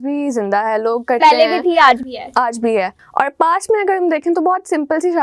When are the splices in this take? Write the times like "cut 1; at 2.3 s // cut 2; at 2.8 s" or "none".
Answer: cut 1; at 3.0 s